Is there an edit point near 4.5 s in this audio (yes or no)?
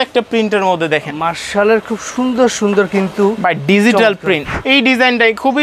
yes